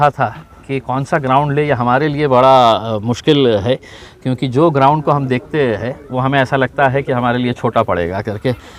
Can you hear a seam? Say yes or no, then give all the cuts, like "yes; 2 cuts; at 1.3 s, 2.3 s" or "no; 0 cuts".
no; 0 cuts